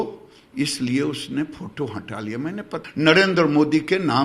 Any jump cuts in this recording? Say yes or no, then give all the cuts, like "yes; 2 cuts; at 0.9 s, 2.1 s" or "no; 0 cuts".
yes; 1 cut; at 2.8 s